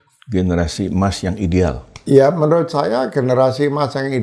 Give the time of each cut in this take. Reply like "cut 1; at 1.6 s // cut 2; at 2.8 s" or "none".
cut 1; at 1.9 s